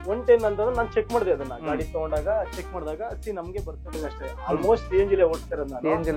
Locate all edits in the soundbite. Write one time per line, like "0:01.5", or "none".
0:03.8